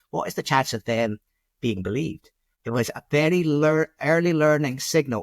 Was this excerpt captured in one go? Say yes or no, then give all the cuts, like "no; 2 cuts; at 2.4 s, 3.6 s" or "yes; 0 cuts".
yes; 0 cuts